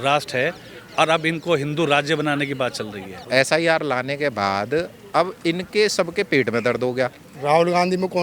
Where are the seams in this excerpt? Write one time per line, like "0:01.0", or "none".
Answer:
0:03.3
0:07.3

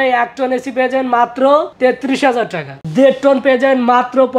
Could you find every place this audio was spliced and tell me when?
0:02.8

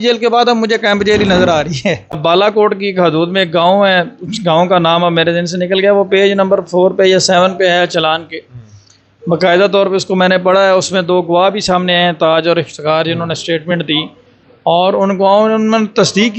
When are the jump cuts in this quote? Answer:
0:02.1

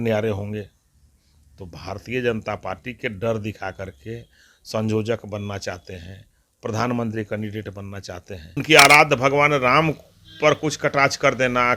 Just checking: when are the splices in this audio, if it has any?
0:08.6

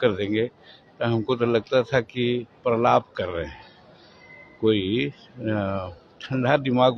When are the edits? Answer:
none

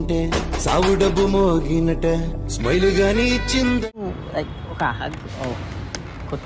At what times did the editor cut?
0:04.1

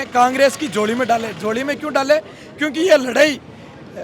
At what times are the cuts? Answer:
none

